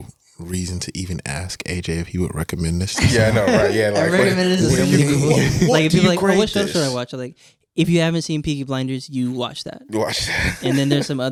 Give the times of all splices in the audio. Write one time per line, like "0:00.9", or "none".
none

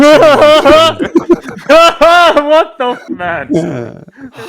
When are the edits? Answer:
0:03.0

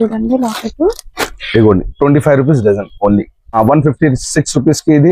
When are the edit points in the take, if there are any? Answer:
0:03.5

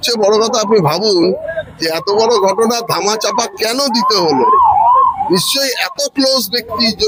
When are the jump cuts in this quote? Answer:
none

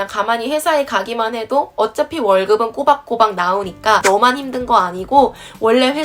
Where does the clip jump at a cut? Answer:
0:04.0

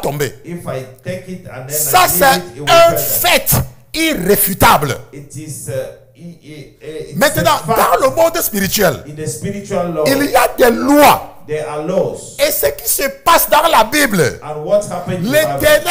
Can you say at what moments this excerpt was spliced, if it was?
none

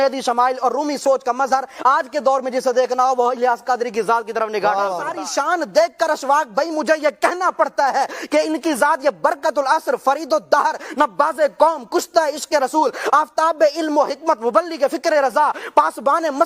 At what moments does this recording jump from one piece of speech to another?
0:05.1

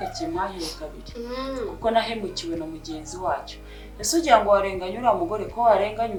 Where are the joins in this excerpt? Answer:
none

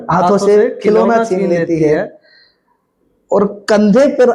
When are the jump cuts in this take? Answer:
none

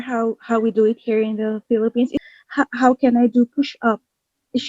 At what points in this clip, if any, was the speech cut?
0:02.2

